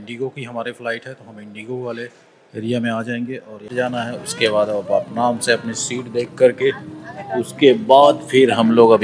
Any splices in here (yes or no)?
yes